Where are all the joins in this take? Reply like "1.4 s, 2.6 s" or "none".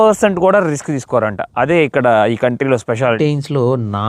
3.2 s